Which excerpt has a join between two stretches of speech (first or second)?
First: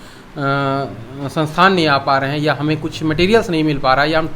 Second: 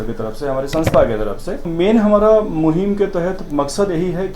second